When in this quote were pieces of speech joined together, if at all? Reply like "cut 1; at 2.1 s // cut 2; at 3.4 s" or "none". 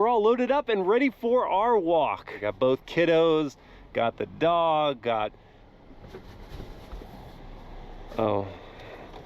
cut 1; at 2.5 s